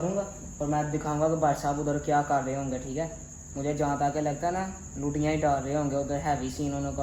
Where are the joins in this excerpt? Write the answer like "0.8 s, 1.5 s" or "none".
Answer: none